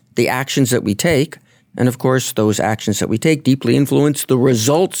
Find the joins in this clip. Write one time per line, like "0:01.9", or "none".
none